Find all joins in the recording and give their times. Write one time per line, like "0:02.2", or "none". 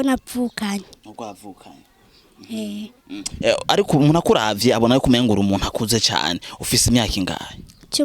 none